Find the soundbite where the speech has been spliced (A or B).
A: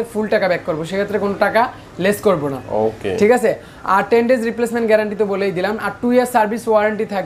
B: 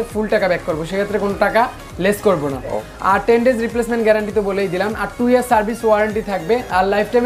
B